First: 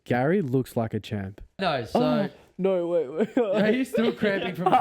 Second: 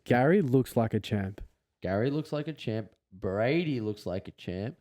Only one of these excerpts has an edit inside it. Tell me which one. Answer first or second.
first